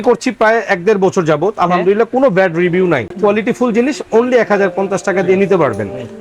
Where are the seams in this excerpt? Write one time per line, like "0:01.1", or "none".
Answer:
none